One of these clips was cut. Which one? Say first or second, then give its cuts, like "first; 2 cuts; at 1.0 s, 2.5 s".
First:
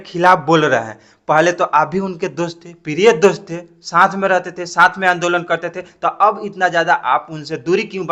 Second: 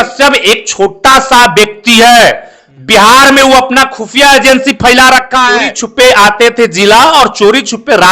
second; 1 cut; at 5.7 s